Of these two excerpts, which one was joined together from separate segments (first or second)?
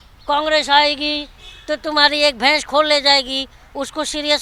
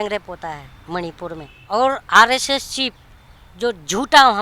second